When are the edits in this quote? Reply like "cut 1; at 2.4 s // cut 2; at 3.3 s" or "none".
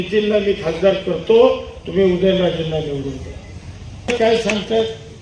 cut 1; at 4.1 s